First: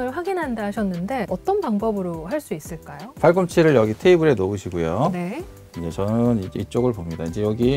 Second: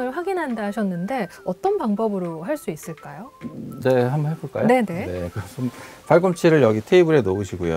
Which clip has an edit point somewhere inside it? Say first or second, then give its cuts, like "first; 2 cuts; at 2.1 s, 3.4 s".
first; 2 cuts; at 1.3 s, 3.0 s